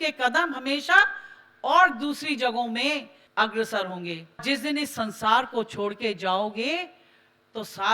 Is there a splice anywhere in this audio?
yes; 2 cuts; at 3.2 s, 4.4 s

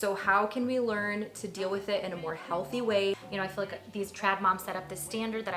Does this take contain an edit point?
yes; 1 cut; at 3.4 s

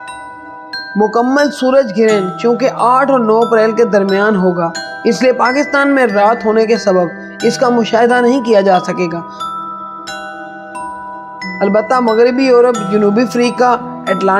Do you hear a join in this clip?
yes; 1 cut; at 0.9 s

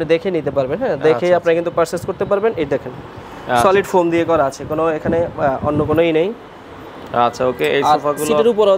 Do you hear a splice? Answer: no; 0 cuts

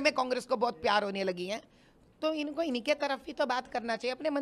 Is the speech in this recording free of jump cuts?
yes; 0 cuts

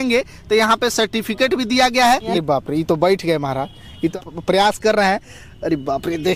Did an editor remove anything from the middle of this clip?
yes; 2 cuts; at 2.4 s, 4.1 s

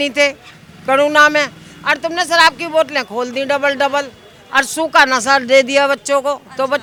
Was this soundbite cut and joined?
no; 0 cuts

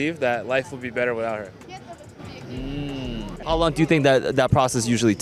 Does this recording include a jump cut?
yes; 1 cut; at 3.3 s

